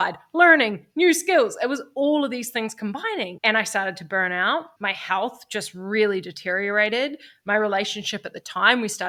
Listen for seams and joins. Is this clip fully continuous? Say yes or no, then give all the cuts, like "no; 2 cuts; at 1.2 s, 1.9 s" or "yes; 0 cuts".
yes; 0 cuts